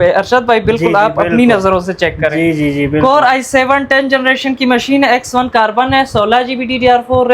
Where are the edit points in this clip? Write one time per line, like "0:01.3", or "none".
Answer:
none